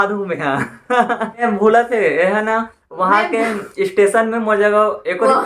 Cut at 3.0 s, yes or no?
no